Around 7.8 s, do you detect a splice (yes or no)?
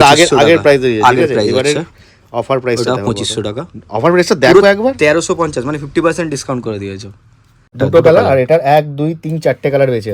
yes